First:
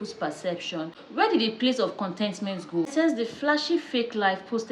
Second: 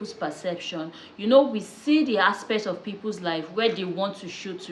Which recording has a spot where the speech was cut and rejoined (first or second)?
first